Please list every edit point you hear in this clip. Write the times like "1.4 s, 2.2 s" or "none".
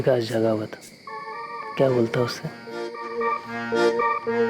3.2 s